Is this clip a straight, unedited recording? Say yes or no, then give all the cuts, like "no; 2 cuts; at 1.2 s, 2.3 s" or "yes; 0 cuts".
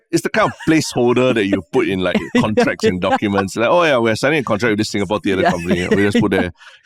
yes; 0 cuts